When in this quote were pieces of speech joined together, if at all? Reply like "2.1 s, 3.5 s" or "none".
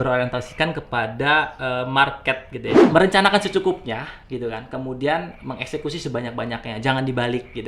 2.8 s